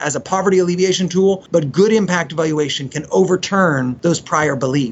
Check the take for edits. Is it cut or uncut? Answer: cut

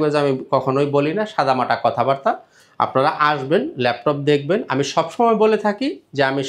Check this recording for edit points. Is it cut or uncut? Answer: uncut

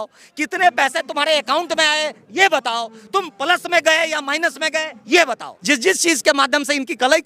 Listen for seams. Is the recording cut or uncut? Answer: cut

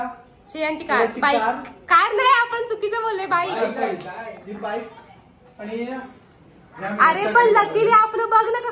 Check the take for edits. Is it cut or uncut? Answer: uncut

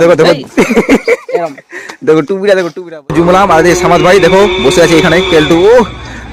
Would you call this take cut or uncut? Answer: cut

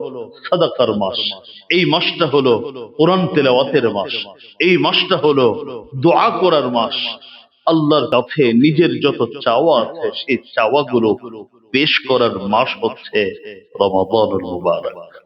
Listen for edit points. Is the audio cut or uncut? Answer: cut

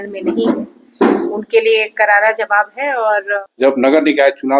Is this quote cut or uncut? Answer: cut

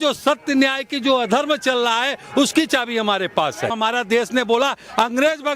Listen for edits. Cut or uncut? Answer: cut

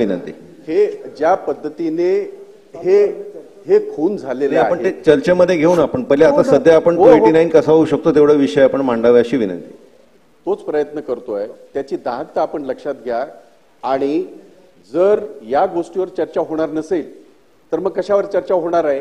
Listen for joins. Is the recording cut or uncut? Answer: uncut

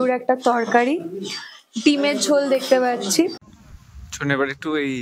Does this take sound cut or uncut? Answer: cut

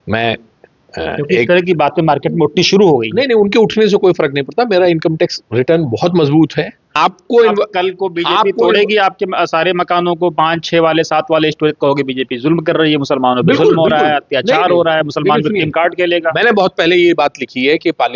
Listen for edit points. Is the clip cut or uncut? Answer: cut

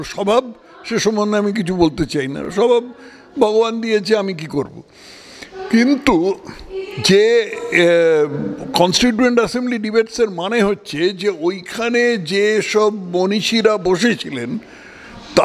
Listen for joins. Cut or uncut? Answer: uncut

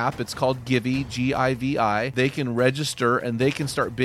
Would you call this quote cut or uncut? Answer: cut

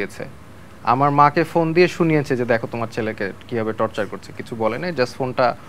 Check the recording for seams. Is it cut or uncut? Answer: uncut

